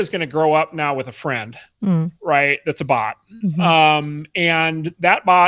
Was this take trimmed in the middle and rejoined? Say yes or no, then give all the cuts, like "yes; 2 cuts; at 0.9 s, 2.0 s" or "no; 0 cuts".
no; 0 cuts